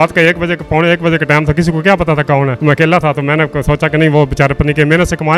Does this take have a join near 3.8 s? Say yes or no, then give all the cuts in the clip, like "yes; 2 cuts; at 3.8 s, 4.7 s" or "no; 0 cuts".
no; 0 cuts